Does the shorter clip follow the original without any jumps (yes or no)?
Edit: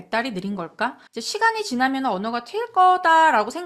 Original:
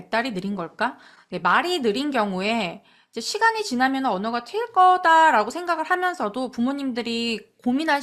no